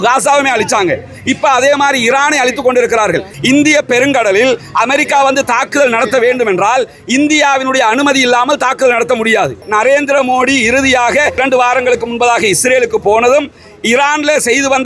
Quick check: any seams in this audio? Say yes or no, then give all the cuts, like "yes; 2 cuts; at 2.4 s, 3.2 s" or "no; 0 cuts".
yes; 3 cuts; at 3.3 s, 9.7 s, 11.4 s